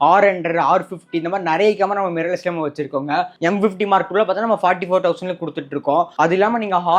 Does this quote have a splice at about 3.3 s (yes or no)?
no